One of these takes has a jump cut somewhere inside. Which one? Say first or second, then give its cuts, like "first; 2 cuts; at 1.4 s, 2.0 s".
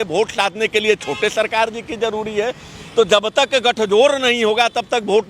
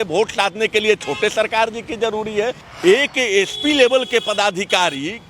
second; 1 cut; at 2.6 s